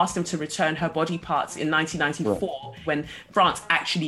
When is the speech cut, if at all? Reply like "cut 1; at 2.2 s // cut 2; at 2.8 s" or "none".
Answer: cut 1; at 2.8 s